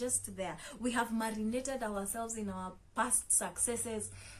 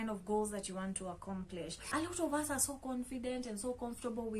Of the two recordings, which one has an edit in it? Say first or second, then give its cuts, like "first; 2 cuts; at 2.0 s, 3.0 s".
second; 1 cut; at 1.8 s